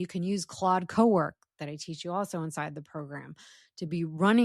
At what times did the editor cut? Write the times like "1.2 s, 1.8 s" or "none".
none

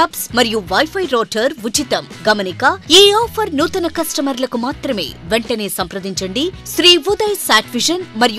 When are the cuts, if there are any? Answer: 6.6 s

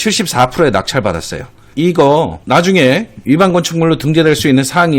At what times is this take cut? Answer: 1.7 s

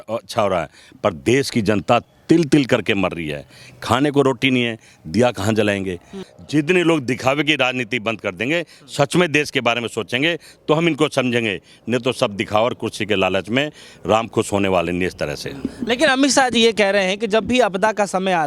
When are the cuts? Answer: none

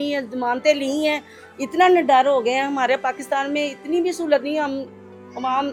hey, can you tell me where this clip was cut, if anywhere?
none

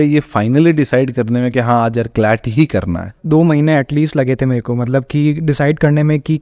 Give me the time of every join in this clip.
3.2 s

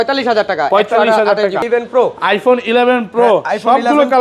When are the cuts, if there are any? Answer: 1.6 s

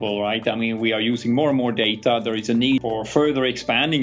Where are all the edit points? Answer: 2.9 s

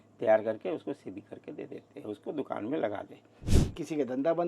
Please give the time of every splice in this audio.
3.4 s

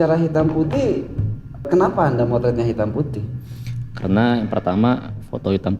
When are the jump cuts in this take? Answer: 1.6 s

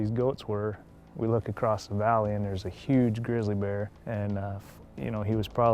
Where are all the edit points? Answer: 1.0 s, 4.0 s

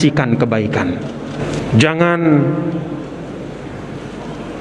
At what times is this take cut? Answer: 1.4 s

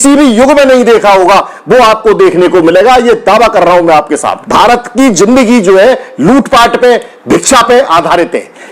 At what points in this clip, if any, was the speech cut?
4.4 s

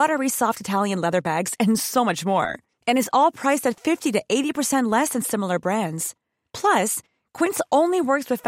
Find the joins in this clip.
none

